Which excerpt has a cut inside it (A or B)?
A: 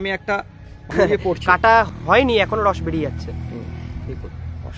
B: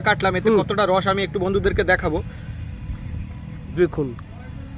A